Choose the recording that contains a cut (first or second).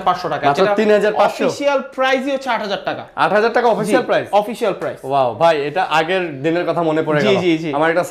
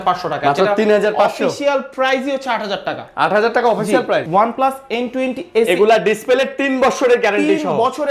second